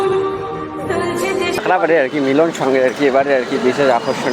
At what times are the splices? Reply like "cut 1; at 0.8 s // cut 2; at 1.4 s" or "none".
cut 1; at 1.7 s